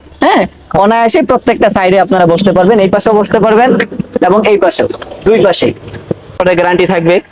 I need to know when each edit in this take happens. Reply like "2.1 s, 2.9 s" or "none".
6.4 s